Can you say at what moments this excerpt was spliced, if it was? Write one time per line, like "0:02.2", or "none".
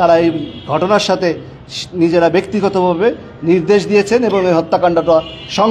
none

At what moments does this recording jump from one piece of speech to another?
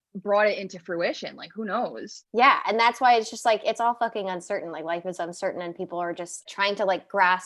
0:02.1
0:06.4

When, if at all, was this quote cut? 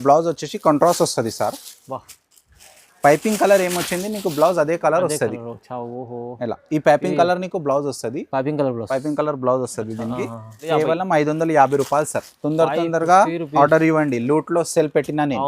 0:10.6

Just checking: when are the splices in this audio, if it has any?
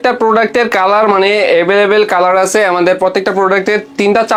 none

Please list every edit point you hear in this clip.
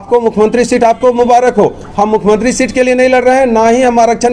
none

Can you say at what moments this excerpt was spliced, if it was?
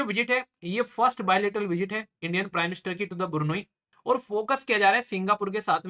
0:03.9

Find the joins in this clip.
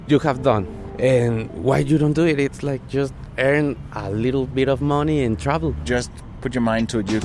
0:04.5
0:05.9

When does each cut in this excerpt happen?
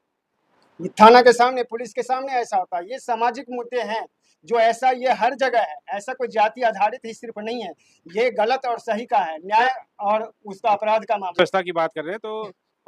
0:11.4

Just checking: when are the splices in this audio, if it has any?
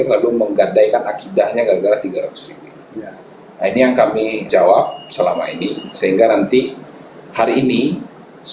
none

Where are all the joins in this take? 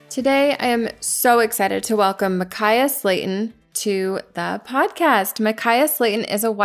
none

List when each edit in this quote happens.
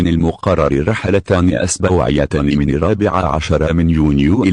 none

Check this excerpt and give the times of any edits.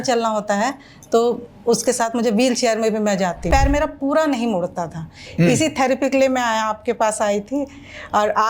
0:03.5

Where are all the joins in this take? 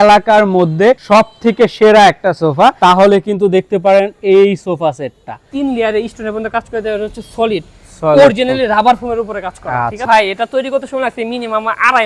0:01.0
0:02.8
0:05.5
0:10.0

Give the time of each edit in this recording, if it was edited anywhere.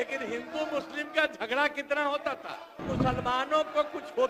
0:02.9

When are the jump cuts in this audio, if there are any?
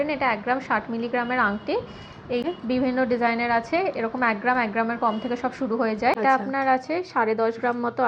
0:02.4
0:06.2

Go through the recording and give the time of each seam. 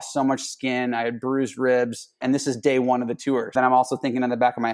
0:02.1
0:03.5

